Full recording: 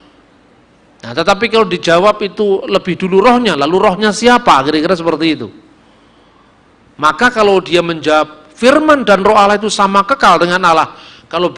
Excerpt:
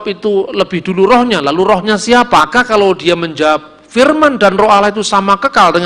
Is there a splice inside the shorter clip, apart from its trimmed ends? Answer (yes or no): yes